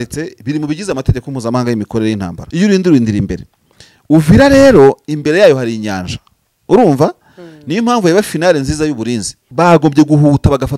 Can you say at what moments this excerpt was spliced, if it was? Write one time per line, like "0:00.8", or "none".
0:02.4
0:09.4